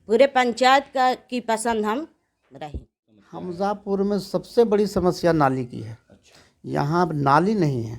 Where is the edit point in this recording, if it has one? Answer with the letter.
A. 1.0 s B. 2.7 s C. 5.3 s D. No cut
B